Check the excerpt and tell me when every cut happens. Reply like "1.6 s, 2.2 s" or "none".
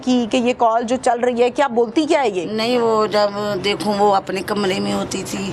none

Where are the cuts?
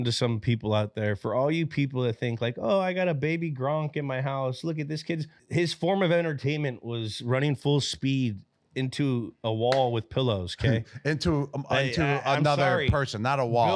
5.4 s

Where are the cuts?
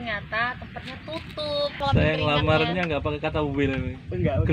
1.8 s

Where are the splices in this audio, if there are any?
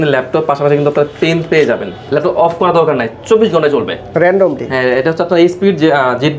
1.9 s

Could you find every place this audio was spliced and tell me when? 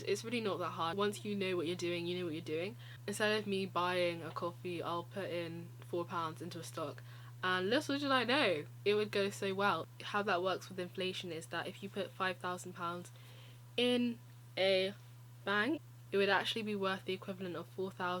0.9 s, 2.9 s, 9.9 s, 16.1 s

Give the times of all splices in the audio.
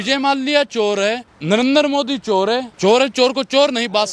1.3 s, 2.7 s

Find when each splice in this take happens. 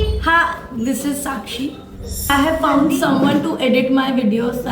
2.1 s

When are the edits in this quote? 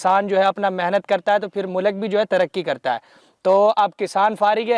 none

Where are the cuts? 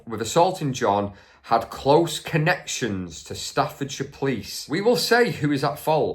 4.5 s

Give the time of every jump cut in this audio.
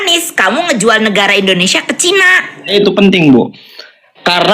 2.7 s

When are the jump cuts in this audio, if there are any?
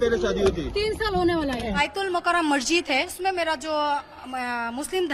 1.8 s, 3.1 s

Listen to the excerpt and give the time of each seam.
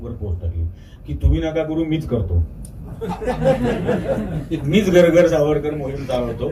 none

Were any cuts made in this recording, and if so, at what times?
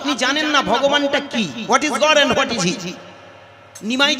none

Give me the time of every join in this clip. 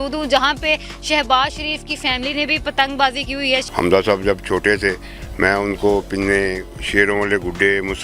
3.7 s

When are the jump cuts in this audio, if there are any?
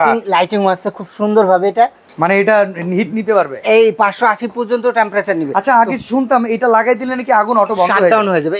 2.0 s

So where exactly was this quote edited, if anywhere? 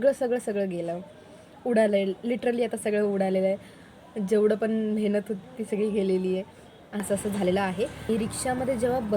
7.0 s, 8.1 s

